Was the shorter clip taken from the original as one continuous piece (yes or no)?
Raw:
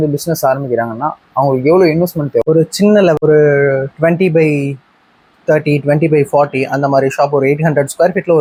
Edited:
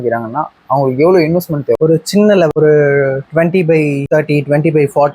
no